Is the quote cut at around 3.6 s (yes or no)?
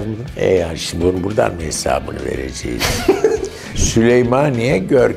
yes